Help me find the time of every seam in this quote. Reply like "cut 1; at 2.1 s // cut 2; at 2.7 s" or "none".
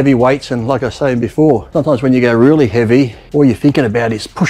cut 1; at 1.7 s // cut 2; at 3.2 s